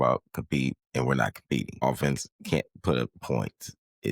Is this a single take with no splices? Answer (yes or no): no